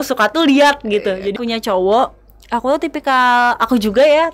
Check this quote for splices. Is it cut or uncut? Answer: cut